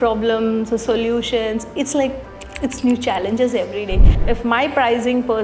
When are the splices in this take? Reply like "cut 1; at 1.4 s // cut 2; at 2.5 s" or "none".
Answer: cut 1; at 4.1 s